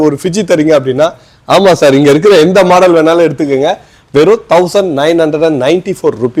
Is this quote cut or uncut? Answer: uncut